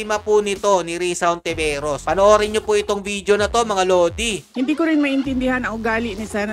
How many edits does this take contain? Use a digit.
0